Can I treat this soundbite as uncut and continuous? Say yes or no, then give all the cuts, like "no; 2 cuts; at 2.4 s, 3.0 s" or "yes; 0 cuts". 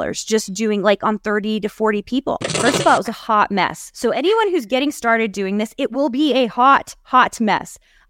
no; 1 cut; at 2.5 s